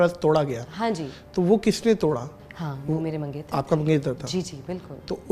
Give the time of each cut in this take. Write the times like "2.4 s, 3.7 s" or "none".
2.4 s